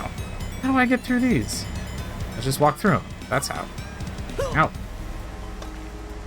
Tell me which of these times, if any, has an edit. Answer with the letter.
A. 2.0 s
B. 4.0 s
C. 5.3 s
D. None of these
B